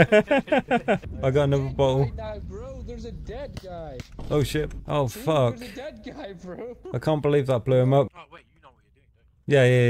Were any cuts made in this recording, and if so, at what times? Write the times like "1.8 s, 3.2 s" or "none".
1.1 s, 8.1 s